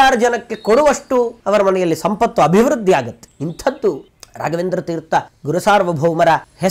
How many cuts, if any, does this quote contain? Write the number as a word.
one